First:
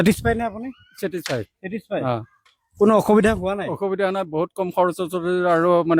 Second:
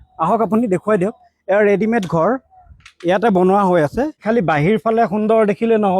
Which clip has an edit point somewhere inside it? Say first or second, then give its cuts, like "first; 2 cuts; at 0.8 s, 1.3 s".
second; 1 cut; at 4.2 s